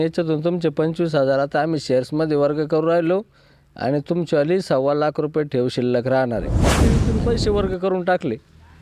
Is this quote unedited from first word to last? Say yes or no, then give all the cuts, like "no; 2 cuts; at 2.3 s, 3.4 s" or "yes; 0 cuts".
no; 1 cut; at 6.9 s